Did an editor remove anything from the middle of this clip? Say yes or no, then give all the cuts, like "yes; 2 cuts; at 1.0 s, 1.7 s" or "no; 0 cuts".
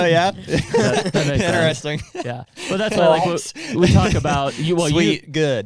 no; 0 cuts